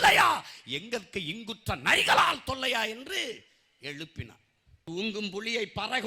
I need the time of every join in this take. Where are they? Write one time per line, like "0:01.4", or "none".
0:04.8